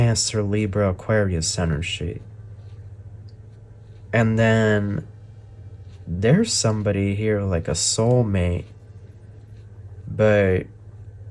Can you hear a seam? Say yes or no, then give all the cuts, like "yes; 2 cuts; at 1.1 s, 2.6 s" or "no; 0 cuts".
no; 0 cuts